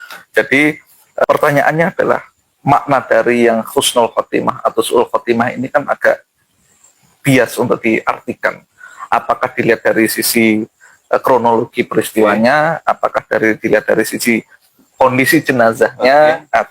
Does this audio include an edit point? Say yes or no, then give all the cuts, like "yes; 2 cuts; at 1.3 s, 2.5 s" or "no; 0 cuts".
yes; 1 cut; at 1.2 s